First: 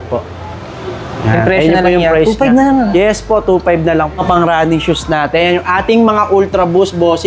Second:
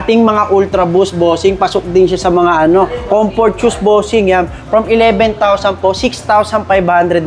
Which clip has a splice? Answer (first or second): first